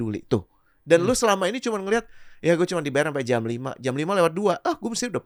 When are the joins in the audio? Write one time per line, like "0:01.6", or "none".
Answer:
none